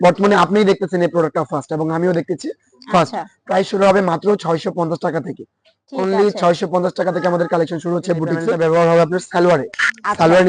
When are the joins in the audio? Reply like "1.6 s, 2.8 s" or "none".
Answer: 8.4 s